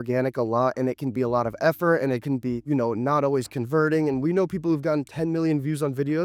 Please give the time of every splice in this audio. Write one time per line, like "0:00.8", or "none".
none